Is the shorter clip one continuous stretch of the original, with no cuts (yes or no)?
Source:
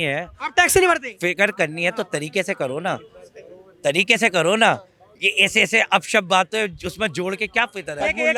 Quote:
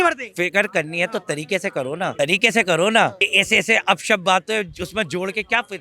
no